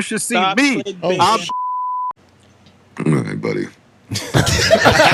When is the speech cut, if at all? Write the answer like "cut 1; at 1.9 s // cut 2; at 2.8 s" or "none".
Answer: none